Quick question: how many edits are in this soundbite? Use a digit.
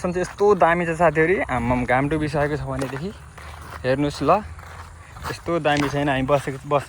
0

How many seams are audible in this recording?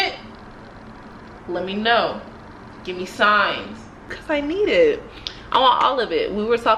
2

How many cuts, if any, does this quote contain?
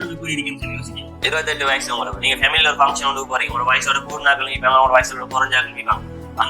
1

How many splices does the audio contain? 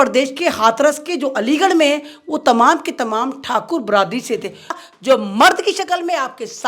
1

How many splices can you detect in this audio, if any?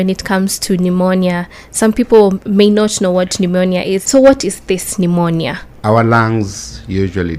2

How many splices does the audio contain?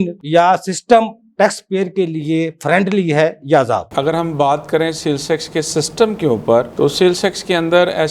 0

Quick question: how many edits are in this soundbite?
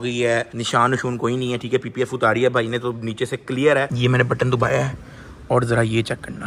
1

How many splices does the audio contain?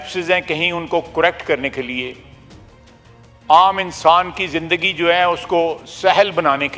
0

